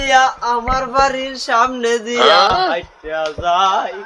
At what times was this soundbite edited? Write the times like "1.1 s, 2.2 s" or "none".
none